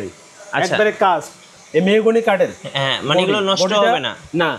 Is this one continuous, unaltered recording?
yes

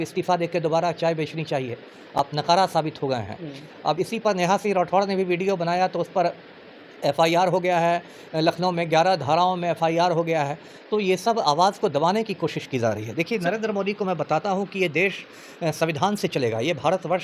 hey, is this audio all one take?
yes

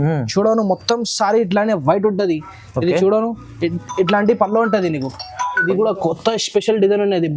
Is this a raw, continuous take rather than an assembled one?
no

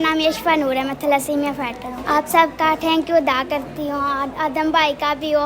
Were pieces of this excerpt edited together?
yes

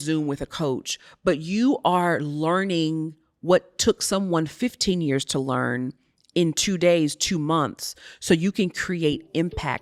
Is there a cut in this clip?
no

